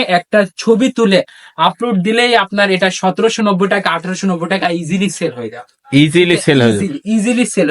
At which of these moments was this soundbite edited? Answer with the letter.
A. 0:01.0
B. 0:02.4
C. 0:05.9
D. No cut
D